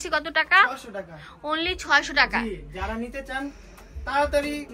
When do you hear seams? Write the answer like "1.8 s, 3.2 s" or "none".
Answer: none